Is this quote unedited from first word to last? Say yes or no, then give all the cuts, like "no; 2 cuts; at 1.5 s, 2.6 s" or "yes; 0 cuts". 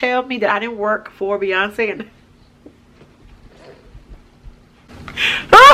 yes; 0 cuts